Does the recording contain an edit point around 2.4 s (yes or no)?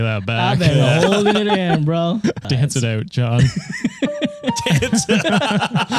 yes